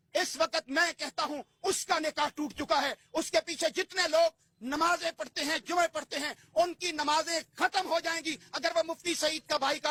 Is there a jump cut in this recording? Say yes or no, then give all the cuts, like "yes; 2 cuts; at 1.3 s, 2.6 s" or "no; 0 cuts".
no; 0 cuts